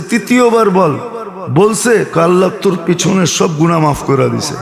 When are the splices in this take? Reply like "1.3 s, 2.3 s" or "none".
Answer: none